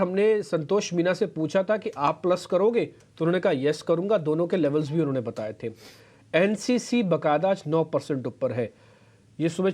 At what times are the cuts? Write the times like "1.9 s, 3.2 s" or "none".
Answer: 4.0 s